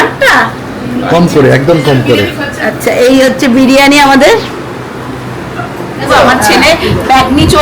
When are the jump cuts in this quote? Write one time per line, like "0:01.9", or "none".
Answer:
0:06.1